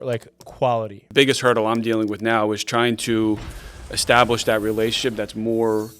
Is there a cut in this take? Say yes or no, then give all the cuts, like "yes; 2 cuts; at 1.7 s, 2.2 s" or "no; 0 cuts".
yes; 1 cut; at 1.1 s